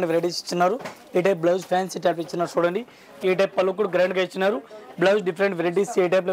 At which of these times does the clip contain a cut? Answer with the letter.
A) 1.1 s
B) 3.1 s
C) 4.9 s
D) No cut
B